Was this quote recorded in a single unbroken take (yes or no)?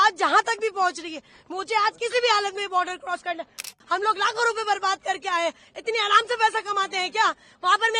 no